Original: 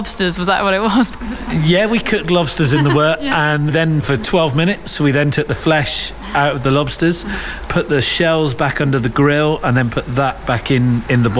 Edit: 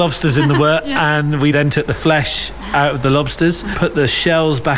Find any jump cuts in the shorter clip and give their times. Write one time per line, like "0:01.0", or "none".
0:01.3
0:03.7